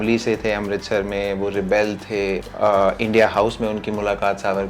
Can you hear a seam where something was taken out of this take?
yes; 1 cut; at 2.5 s

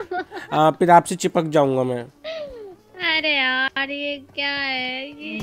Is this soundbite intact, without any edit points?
yes; 0 cuts

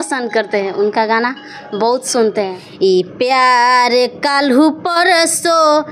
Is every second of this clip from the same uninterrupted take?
no; 1 cut; at 2.6 s

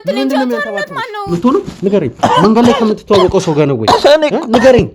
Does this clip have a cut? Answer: yes; 1 cut; at 1.3 s

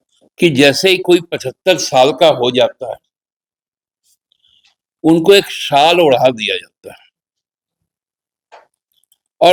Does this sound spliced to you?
no; 0 cuts

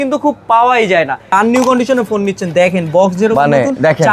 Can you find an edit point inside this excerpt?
yes; 1 cut; at 1.3 s

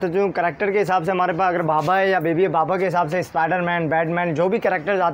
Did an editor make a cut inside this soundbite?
no; 0 cuts

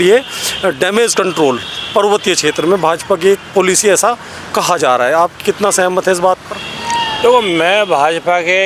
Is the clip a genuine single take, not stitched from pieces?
yes; 0 cuts

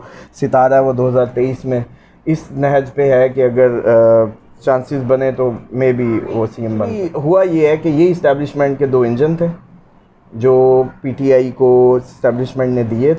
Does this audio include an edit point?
yes; 1 cut; at 7.1 s

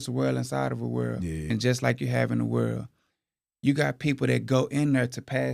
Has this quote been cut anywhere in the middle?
yes; 1 cut; at 1.5 s

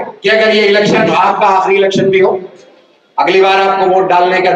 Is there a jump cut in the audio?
no; 0 cuts

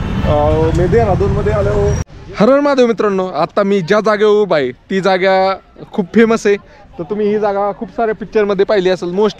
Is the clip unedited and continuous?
no; 1 cut; at 2.0 s

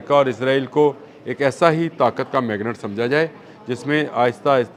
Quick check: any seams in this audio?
no; 0 cuts

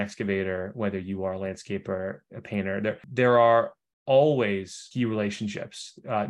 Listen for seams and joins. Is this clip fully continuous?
no; 2 cuts; at 3.0 s, 4.8 s

